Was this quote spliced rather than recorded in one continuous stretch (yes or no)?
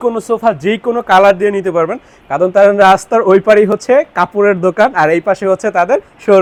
no